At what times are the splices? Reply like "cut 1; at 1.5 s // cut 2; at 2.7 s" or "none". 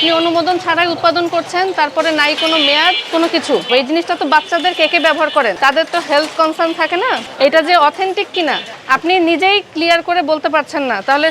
cut 1; at 3.7 s // cut 2; at 5.6 s // cut 3; at 7.3 s // cut 4; at 8.7 s